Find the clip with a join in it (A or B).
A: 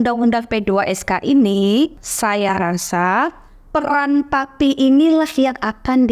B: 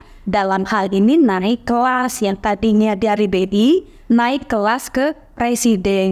A